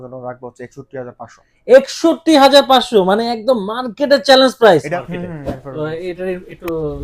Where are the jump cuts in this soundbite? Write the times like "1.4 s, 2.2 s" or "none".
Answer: 4.8 s